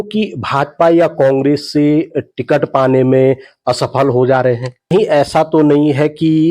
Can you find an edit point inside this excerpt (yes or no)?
yes